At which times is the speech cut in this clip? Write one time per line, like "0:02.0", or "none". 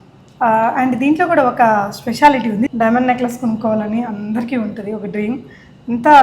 0:02.7